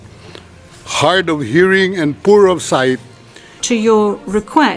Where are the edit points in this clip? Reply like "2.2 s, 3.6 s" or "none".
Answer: 3.6 s